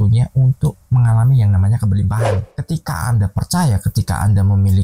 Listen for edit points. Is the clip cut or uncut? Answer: cut